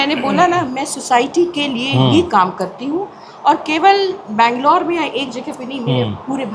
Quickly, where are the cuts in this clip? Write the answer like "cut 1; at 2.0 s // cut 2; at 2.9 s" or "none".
none